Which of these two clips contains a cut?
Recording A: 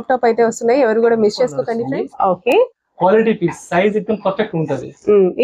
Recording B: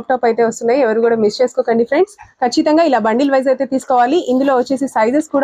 A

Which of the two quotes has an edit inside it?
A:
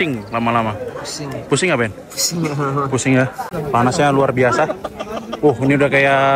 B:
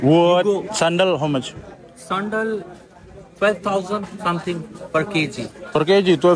A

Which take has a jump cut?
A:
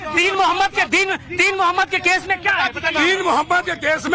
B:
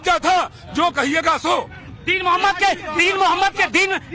A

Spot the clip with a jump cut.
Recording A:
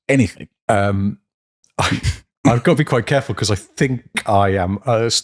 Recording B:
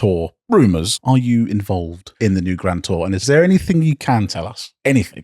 B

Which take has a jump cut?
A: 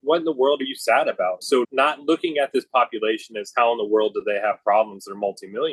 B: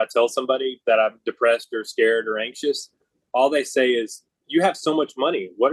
A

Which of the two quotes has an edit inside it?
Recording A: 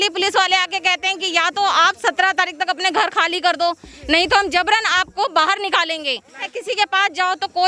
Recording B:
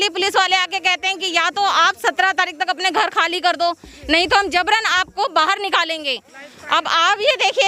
A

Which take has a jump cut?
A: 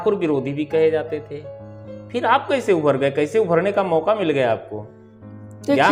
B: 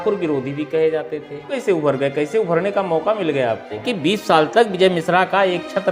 B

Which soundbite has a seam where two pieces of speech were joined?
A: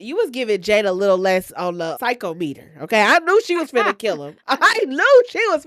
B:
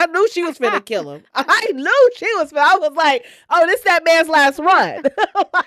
A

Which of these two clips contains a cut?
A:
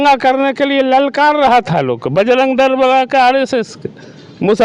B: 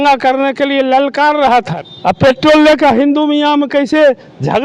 B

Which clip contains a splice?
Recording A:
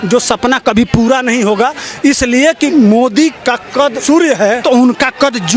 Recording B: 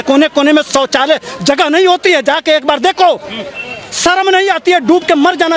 A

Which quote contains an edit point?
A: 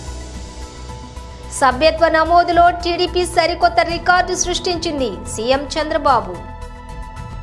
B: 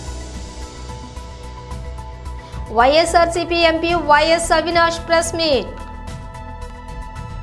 B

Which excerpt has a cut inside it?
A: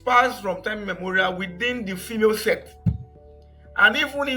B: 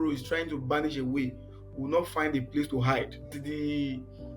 B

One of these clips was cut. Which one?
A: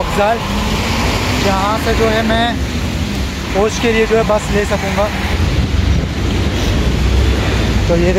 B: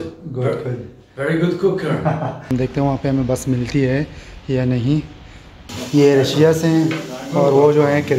B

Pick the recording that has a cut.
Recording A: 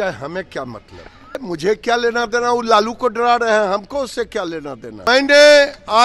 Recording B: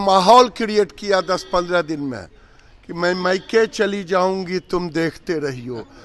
A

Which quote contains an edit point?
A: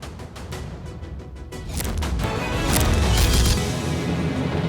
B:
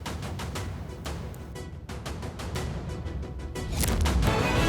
A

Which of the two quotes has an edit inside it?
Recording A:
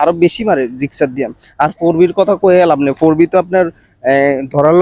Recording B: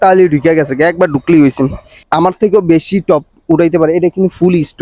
B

